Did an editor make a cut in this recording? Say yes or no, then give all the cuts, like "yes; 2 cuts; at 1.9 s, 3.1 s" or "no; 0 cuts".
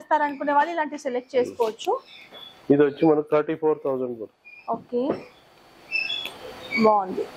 no; 0 cuts